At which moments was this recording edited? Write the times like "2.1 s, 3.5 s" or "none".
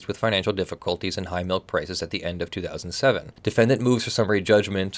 3.3 s